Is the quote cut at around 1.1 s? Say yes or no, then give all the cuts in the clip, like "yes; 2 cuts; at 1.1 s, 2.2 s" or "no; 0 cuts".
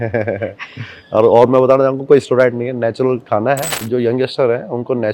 no; 1 cut; at 3.8 s